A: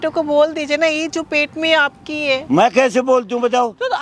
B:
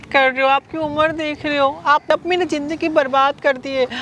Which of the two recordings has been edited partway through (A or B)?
B